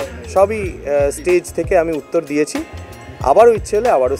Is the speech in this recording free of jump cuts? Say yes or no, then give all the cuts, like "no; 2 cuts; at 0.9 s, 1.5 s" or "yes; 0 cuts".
yes; 0 cuts